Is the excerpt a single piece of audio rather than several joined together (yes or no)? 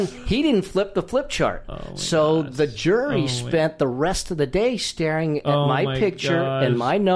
yes